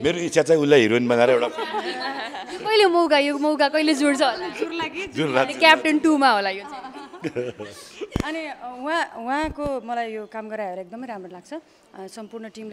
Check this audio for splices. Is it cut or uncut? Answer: uncut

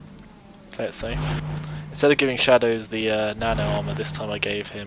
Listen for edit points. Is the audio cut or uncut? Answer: uncut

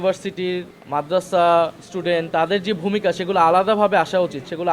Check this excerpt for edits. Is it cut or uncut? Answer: uncut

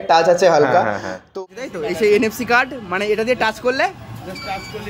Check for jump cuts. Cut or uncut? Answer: cut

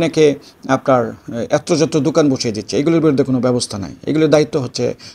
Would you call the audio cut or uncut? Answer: uncut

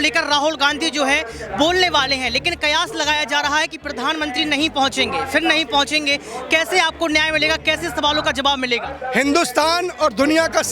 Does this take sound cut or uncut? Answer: uncut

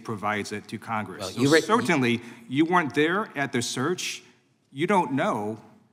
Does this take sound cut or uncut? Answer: uncut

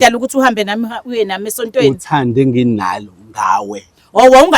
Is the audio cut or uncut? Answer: uncut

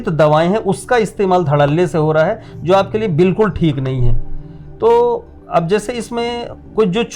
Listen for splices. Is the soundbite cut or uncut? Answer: uncut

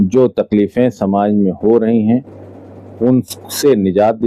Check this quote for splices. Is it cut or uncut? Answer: uncut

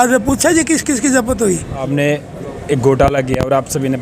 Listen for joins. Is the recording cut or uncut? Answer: cut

